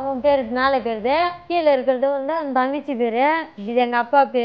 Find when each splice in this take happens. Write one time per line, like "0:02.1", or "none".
0:01.4
0:03.5